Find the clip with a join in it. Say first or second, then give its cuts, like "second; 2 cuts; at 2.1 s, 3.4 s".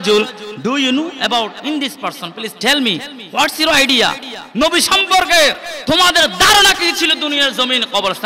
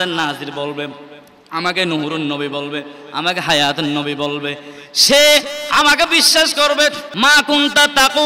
second; 1 cut; at 7.1 s